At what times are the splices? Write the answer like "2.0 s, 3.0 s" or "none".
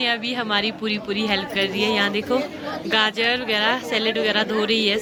none